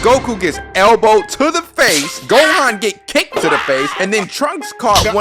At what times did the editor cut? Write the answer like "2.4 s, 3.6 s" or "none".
none